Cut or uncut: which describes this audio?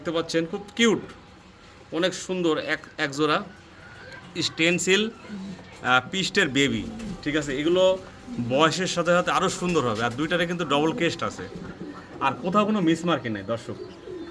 uncut